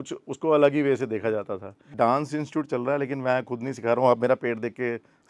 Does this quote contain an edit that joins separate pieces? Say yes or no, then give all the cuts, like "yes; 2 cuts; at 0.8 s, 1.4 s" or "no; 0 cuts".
yes; 1 cut; at 1.8 s